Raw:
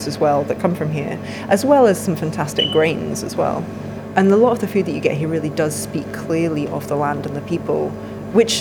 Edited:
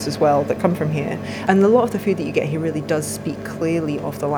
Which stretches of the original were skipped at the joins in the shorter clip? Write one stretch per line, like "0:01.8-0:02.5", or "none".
0:01.3-0:04.0